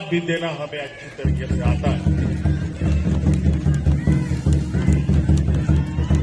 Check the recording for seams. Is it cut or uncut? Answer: uncut